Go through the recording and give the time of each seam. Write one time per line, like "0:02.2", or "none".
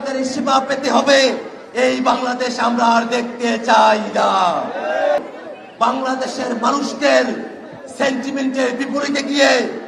0:05.2